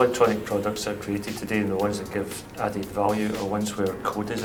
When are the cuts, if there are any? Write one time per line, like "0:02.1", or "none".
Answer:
none